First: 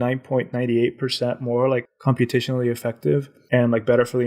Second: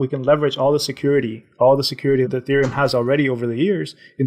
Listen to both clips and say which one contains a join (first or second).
first